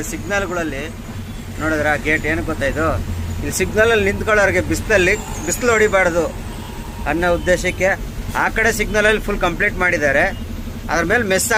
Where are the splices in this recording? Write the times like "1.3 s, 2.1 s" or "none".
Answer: none